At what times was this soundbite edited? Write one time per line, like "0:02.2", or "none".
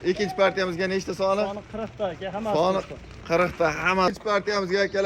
0:04.1